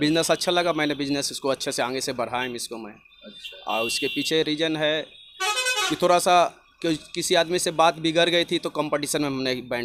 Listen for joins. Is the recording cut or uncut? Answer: uncut